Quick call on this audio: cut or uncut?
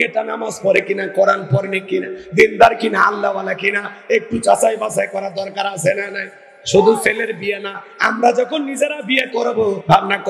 uncut